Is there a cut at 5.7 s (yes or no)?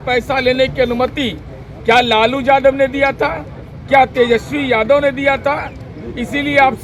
no